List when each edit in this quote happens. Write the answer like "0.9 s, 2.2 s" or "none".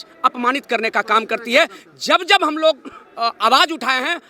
none